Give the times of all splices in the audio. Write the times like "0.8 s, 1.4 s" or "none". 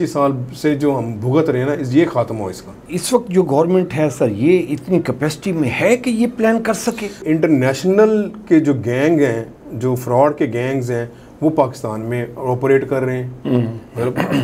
2.9 s, 7.2 s